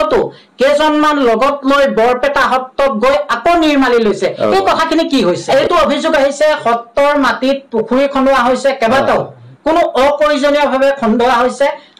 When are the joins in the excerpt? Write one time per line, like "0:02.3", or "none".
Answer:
0:05.4

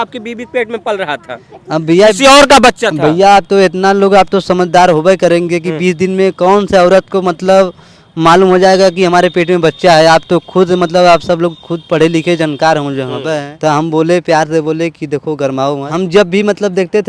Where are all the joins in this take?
0:13.5
0:15.9

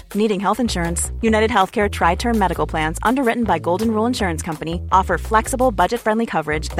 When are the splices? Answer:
none

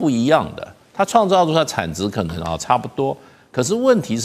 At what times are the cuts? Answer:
none

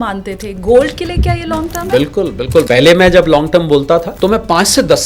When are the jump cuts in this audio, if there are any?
0:02.6
0:04.1

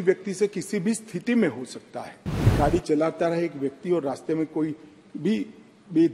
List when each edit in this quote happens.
0:02.5

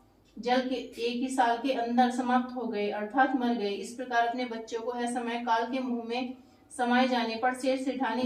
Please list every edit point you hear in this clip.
none

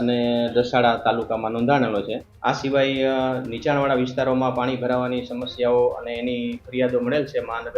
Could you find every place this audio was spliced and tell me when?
0:02.2

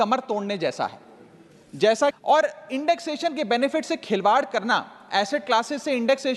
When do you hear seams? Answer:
0:02.2

